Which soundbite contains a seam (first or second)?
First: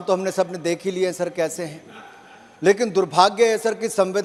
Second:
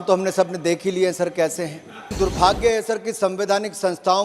second